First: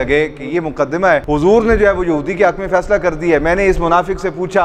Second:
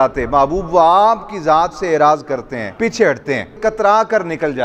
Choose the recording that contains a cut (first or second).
second